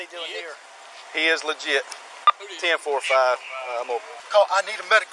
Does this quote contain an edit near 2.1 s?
no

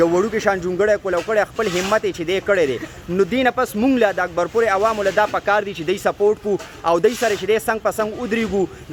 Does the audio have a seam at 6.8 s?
no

